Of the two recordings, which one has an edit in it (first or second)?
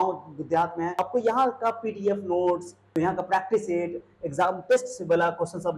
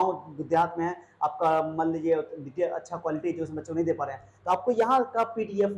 first